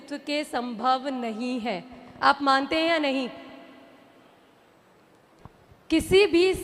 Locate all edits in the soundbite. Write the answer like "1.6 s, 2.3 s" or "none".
5.4 s